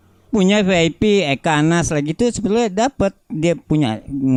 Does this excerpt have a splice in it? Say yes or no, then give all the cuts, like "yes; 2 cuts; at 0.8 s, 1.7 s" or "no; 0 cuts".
no; 0 cuts